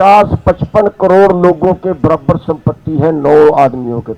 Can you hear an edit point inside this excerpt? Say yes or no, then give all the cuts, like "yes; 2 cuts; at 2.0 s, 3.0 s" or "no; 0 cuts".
no; 0 cuts